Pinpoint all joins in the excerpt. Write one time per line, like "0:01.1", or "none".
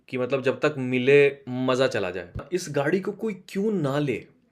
0:02.5